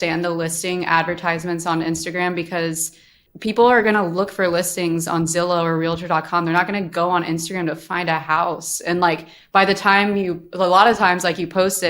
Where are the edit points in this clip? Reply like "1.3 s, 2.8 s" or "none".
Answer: none